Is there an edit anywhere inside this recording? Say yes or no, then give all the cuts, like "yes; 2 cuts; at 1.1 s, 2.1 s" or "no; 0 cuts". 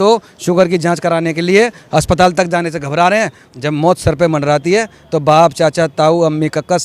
yes; 1 cut; at 3.4 s